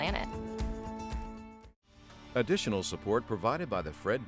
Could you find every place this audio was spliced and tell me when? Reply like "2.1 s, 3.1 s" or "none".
2.2 s